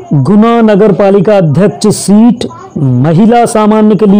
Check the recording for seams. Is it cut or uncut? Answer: uncut